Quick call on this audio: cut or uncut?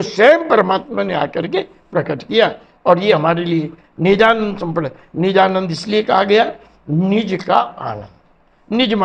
uncut